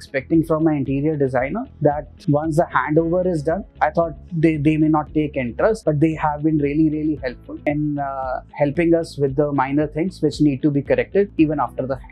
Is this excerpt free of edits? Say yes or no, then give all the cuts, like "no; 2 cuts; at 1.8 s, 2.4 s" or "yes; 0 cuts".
no; 5 cuts; at 1.9 s, 3.7 s, 5.8 s, 7.5 s, 11.3 s